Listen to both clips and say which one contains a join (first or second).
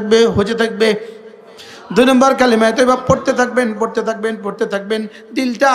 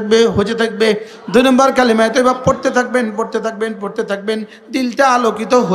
second